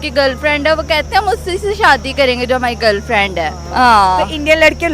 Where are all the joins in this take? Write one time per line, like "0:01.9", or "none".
0:03.6